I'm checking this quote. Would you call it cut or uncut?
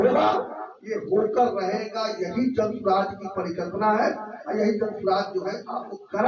uncut